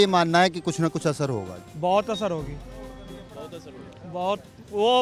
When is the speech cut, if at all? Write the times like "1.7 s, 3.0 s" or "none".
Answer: 1.6 s